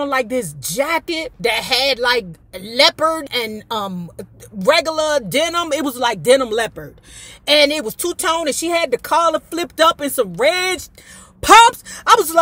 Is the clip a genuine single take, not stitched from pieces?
no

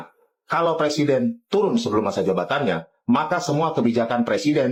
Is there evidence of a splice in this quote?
no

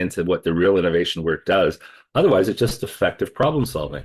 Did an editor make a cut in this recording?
no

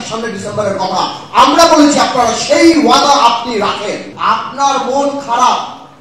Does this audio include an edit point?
yes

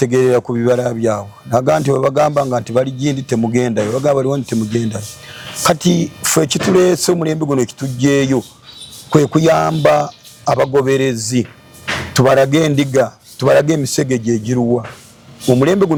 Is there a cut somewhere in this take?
no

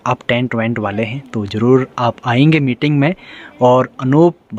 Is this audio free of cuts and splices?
yes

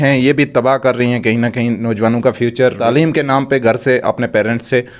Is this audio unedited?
no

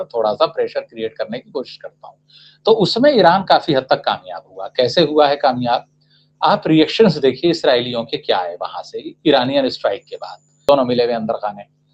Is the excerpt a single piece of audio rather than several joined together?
no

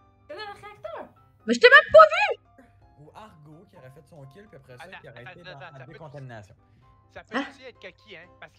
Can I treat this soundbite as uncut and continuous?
no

